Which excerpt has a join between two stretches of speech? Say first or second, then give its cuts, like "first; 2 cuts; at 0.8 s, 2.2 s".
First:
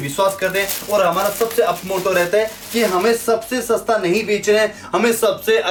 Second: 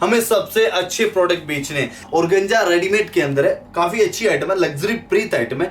second; 1 cut; at 2.0 s